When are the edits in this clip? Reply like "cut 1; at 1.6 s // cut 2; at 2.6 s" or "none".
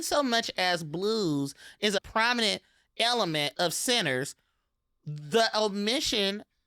cut 1; at 2.0 s